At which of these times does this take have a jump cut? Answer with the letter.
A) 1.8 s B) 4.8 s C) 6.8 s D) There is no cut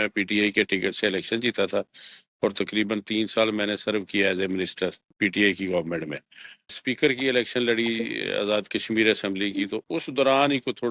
C